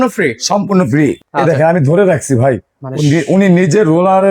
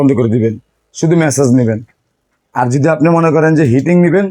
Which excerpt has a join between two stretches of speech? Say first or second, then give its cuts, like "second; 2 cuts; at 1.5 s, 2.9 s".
first; 1 cut; at 1.2 s